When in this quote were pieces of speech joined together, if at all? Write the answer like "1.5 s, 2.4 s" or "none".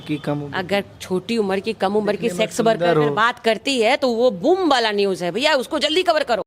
none